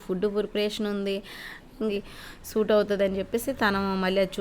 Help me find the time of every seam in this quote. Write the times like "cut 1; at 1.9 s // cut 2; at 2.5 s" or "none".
cut 1; at 1.9 s